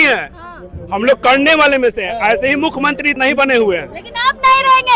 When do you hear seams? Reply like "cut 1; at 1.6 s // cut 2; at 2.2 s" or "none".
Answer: cut 1; at 3.2 s